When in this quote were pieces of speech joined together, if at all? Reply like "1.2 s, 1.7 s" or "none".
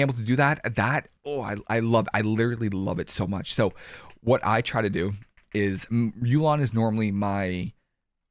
none